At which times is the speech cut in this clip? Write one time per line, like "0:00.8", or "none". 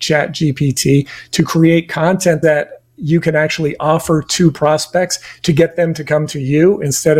0:02.4

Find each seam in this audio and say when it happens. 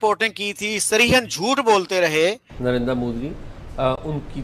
0:02.5

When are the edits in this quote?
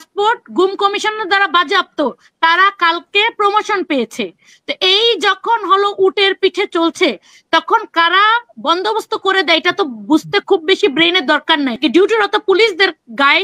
0:11.8

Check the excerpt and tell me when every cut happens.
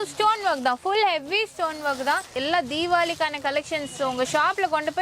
0:02.3

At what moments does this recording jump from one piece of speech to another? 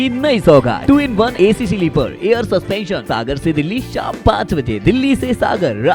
0:00.9
0:03.0

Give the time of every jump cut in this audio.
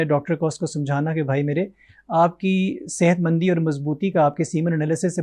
none

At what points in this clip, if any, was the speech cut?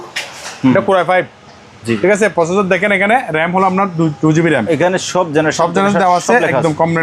none

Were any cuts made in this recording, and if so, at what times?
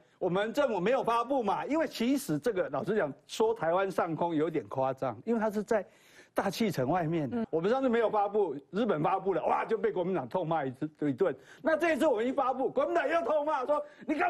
0:07.4

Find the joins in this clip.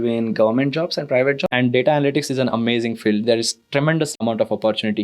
0:01.4
0:04.1

